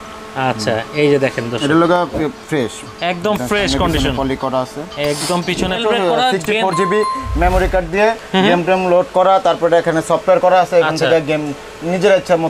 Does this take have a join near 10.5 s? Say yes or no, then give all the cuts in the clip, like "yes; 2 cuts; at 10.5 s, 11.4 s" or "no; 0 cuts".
no; 1 cut; at 5.8 s